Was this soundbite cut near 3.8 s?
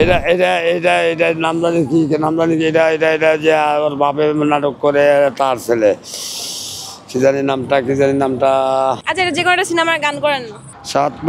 no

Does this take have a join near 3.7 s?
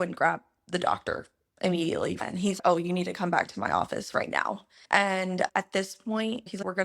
no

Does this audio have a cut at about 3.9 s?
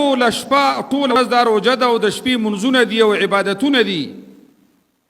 no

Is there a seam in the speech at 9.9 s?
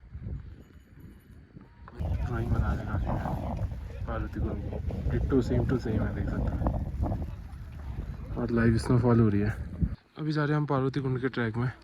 yes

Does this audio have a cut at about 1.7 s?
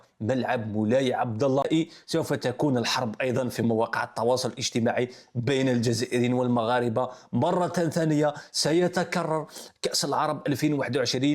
yes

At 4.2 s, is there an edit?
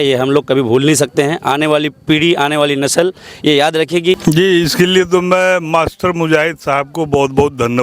yes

